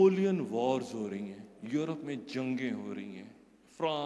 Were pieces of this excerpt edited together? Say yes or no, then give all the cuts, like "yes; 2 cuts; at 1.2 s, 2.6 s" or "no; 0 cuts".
no; 0 cuts